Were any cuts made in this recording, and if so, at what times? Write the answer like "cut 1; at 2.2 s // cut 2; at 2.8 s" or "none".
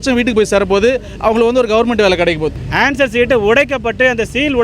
cut 1; at 2.5 s